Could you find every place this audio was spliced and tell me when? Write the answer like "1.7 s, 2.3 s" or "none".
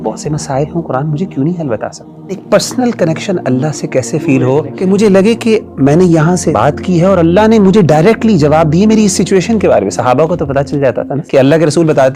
2.4 s, 4.7 s, 6.5 s, 11.2 s